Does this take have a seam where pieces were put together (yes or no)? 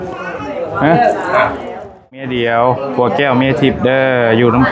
yes